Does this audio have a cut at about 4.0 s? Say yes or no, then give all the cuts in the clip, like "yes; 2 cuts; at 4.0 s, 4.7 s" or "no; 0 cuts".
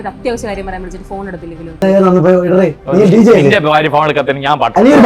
no; 1 cut; at 1.8 s